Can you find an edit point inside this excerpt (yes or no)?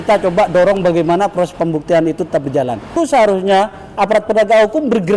yes